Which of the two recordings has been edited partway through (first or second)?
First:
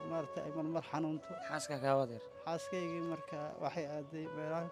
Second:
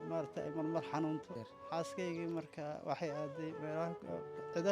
second